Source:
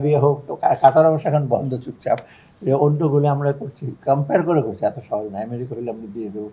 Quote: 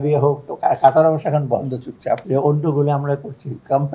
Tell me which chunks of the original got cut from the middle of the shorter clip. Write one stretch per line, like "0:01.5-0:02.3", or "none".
0:02.2-0:02.6